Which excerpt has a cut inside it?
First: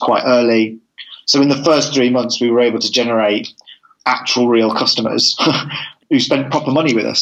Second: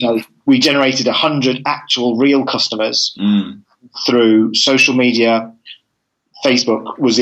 first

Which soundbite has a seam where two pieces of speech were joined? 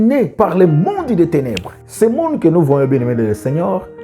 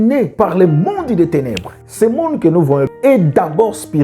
second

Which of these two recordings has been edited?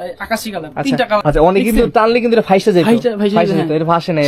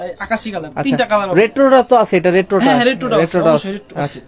first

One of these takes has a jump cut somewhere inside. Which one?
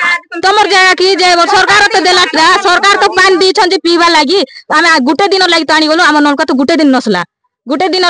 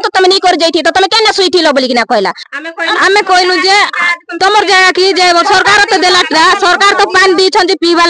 second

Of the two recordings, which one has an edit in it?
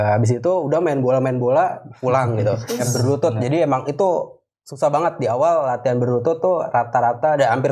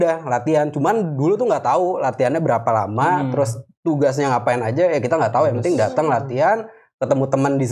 first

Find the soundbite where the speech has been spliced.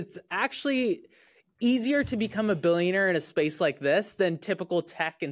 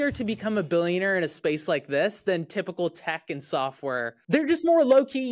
second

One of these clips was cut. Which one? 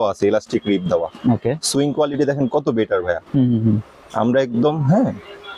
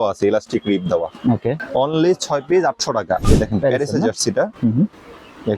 second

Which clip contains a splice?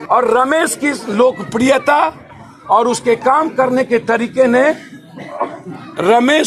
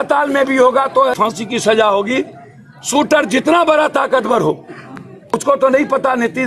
second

